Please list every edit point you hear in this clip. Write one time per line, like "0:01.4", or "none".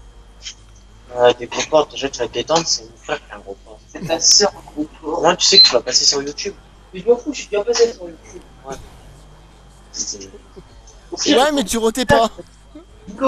none